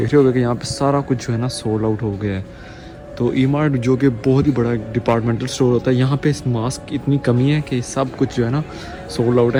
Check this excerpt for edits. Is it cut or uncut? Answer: uncut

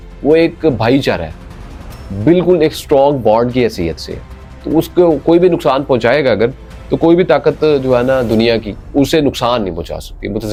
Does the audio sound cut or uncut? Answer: uncut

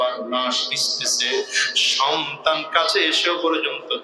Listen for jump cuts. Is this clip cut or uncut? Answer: uncut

